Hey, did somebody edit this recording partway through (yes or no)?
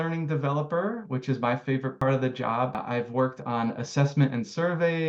yes